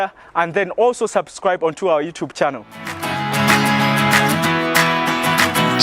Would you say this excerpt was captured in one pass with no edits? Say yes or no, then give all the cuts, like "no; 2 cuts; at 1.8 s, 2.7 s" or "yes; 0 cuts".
no; 1 cut; at 3.2 s